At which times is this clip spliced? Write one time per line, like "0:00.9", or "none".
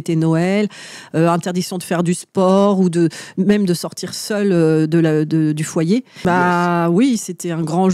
0:06.2